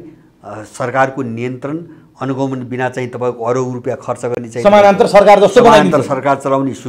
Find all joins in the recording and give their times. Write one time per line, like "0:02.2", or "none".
none